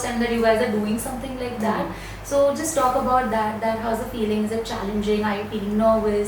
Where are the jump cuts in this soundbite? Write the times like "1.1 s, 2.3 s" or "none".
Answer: none